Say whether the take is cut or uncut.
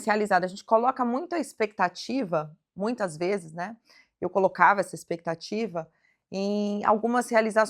uncut